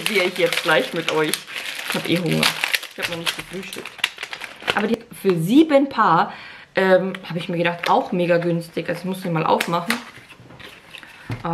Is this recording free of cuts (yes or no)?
no